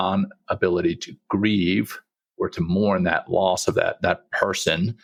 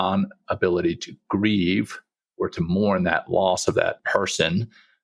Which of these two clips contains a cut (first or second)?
second